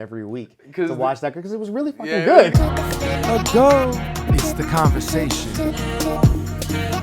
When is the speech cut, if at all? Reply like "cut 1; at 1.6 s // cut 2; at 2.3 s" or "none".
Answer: cut 1; at 2.5 s